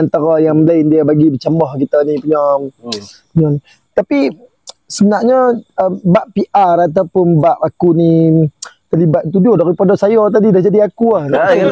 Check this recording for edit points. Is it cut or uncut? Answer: uncut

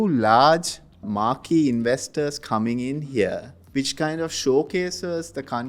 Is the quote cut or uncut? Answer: cut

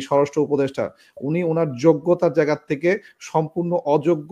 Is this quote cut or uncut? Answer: uncut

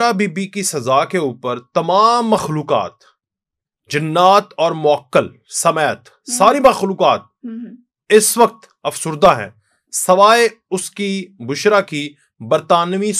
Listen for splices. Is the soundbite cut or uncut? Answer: uncut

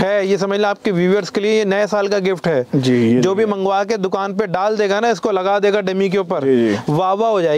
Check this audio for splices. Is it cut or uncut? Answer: uncut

